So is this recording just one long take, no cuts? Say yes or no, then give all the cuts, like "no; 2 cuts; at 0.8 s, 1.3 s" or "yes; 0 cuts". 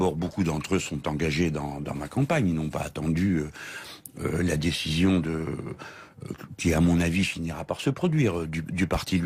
yes; 0 cuts